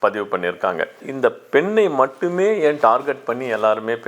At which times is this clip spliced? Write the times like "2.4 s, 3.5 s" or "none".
1.1 s